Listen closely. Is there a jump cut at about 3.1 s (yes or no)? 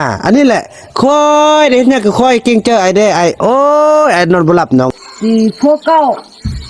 no